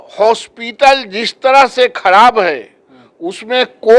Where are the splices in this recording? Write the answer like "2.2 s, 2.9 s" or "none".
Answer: none